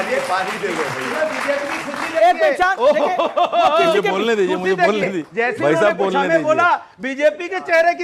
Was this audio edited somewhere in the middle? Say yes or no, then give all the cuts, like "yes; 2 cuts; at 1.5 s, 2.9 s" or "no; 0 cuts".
no; 0 cuts